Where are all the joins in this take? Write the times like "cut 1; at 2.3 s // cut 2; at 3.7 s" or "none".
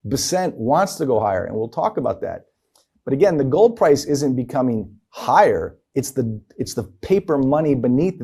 none